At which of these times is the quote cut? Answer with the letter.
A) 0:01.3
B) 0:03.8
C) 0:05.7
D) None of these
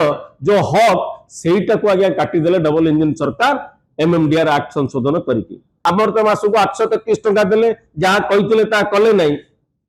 C